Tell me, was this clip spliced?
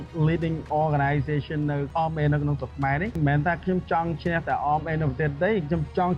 yes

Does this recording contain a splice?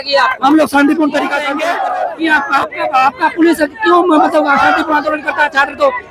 yes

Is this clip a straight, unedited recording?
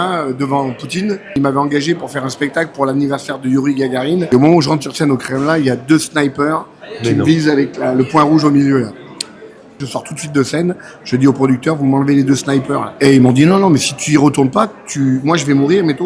no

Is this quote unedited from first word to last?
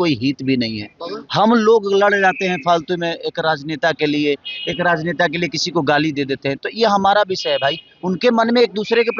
yes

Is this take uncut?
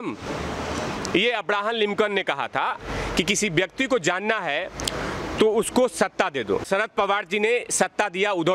no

